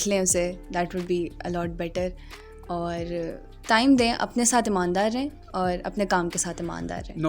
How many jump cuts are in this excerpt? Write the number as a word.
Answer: zero